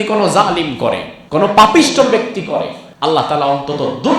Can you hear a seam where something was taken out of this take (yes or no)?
yes